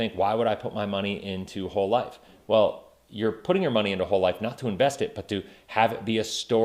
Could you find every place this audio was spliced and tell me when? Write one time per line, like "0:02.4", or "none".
none